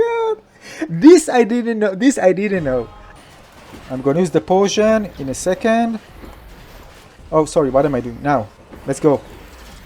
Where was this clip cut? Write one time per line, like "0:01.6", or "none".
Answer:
0:03.0